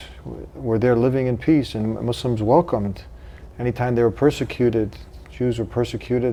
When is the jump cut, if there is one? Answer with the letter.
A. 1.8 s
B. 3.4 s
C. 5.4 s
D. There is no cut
D